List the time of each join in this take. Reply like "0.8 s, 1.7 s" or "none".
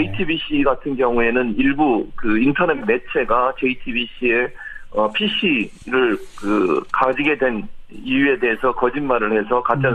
none